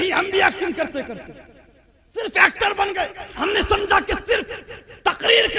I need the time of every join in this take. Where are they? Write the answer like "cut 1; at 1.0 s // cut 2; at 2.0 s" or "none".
cut 1; at 3.3 s